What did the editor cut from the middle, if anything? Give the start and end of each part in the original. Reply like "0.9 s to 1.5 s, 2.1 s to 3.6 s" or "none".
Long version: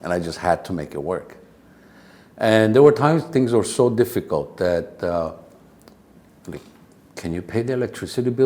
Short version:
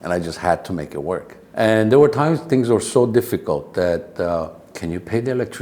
1.4 s to 2.2 s, 5.5 s to 7.1 s